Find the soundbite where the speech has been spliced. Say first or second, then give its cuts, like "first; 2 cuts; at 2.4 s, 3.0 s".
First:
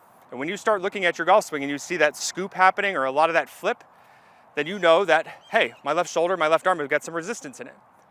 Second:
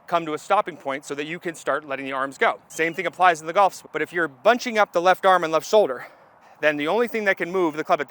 second; 3 cuts; at 2.7 s, 3.8 s, 6.4 s